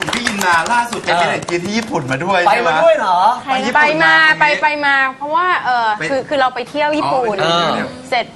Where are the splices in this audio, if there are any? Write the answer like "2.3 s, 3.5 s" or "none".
none